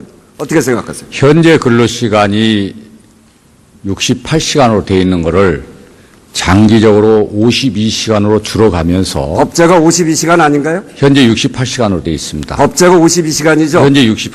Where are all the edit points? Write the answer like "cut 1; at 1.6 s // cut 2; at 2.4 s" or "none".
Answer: none